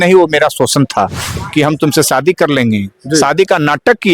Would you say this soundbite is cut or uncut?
cut